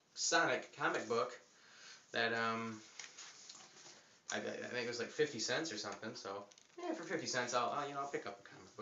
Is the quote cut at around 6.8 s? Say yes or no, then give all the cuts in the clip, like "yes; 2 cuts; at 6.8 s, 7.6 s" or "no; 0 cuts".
yes; 1 cut; at 6.8 s